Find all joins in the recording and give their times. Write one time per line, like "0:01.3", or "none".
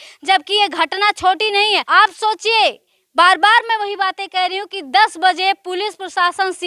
0:01.8